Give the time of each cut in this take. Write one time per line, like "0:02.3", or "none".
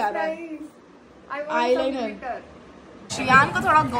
0:03.1